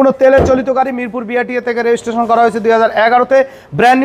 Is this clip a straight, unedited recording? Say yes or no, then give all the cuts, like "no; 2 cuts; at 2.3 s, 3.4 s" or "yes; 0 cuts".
yes; 0 cuts